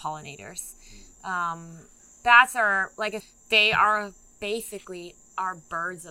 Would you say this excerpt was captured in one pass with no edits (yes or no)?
no